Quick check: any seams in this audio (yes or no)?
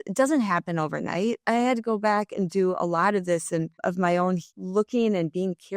yes